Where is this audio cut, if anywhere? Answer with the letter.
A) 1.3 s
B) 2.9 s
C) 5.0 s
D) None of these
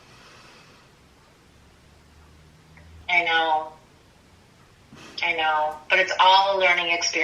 B